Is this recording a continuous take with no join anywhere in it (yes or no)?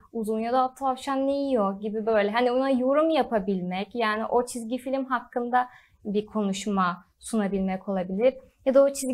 yes